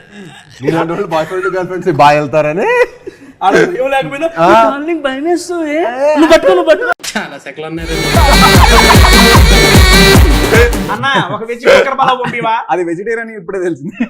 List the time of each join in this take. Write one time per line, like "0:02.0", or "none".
0:07.1
0:10.9